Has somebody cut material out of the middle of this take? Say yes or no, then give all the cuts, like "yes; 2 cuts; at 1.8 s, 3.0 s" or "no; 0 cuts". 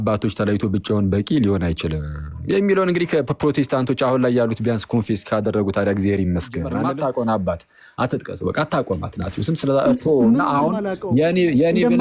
yes; 1 cut; at 6.7 s